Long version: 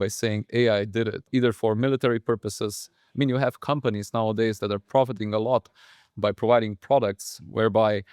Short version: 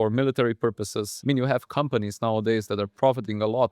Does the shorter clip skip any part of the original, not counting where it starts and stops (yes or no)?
yes